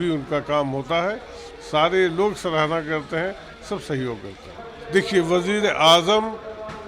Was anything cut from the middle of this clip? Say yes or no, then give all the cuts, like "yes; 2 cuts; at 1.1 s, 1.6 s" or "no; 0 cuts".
yes; 1 cut; at 4.7 s